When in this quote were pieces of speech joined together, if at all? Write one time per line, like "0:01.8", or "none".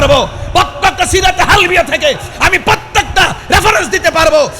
none